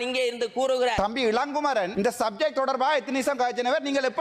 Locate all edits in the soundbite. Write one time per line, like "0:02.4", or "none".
0:01.0
0:01.9